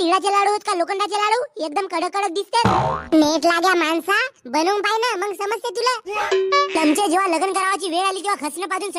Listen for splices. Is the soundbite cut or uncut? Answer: cut